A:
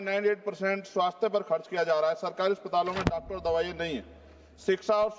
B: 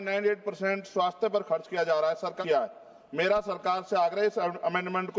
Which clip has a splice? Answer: B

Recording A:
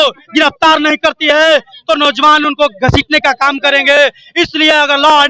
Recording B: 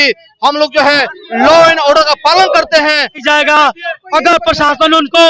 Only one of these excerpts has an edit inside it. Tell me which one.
B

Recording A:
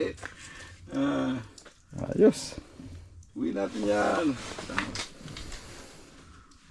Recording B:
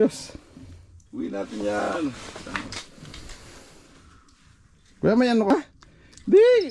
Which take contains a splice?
B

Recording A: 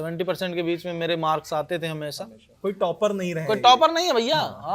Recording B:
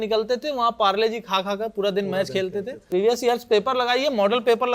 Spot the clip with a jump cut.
B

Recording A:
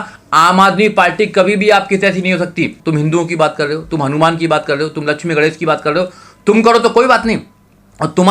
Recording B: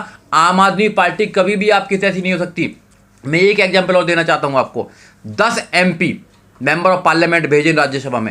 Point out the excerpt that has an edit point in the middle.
A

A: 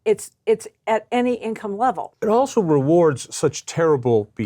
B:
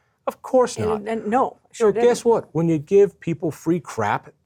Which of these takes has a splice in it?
A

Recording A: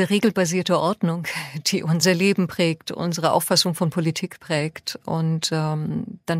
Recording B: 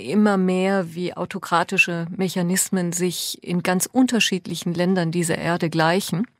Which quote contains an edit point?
A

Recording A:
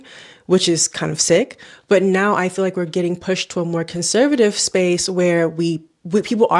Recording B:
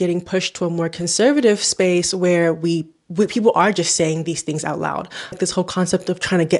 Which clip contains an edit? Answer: B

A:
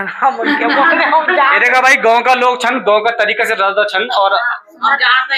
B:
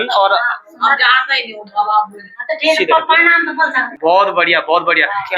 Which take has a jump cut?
B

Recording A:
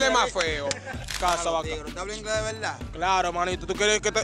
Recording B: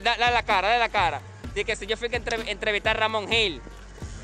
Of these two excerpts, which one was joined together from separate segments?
A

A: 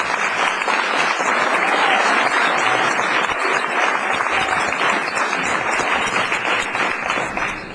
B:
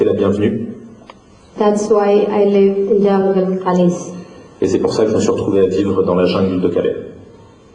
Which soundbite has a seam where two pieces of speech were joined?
B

